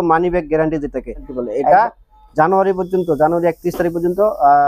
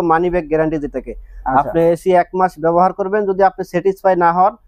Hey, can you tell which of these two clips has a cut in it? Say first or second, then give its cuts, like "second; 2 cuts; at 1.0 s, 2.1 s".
first; 1 cut; at 1.3 s